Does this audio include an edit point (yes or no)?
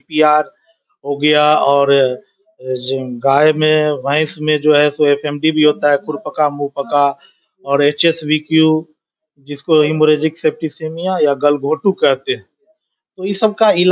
no